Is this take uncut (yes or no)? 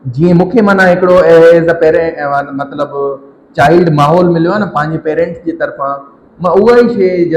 yes